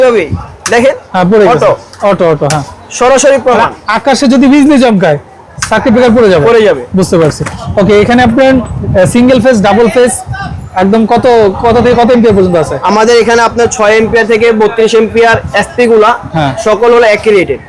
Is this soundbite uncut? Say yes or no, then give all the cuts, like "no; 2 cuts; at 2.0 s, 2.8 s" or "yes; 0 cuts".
yes; 0 cuts